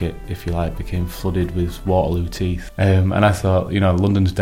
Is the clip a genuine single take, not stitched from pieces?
no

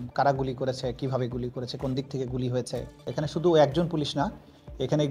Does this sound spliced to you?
yes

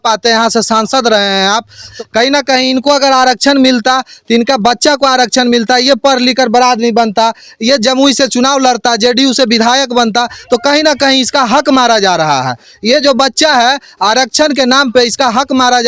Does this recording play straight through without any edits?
no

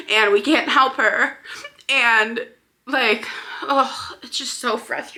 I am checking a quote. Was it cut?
no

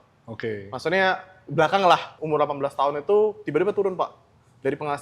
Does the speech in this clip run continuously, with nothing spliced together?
no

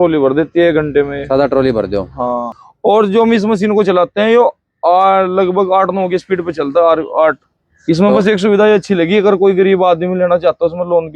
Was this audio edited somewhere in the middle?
yes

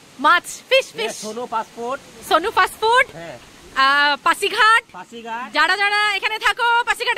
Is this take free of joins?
yes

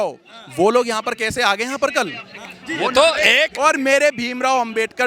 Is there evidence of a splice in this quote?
no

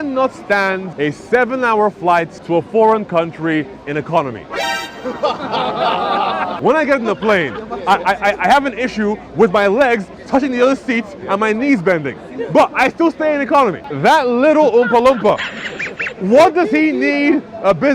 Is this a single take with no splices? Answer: no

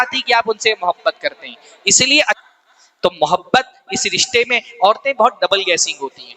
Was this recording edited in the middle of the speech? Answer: yes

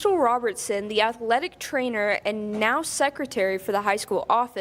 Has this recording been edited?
no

